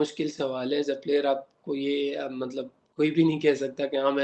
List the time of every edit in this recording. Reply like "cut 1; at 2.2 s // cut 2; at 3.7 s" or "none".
none